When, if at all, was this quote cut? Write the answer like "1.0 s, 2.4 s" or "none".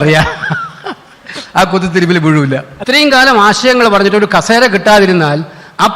2.7 s

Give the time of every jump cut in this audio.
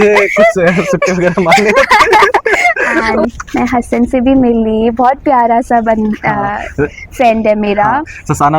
3.2 s

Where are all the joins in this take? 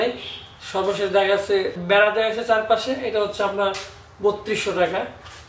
1.8 s

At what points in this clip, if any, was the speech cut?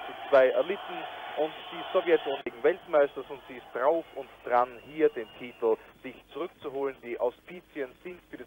2.5 s

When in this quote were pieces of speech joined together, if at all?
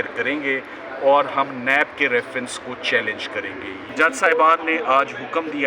3.9 s

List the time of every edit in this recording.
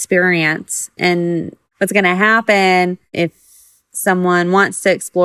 1.6 s, 3.1 s

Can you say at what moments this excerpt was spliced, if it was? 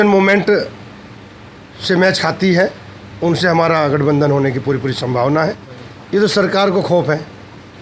5.7 s

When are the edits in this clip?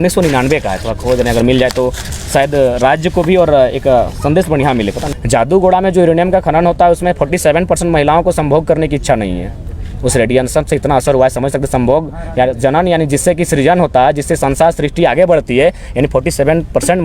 5.0 s

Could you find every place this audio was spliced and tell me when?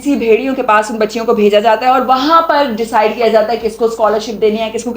none

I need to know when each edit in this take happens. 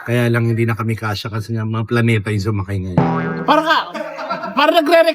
3.4 s

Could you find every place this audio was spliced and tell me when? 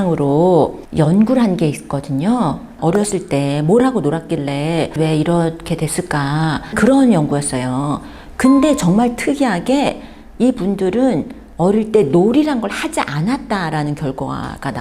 none

